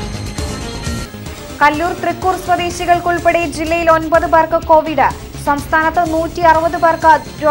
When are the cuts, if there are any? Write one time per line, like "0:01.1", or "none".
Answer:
0:01.0